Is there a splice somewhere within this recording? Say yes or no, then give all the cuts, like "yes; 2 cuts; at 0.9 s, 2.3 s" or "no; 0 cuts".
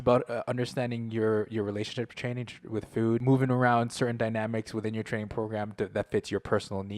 yes; 1 cut; at 3.2 s